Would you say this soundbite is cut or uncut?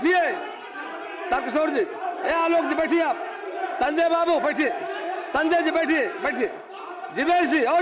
uncut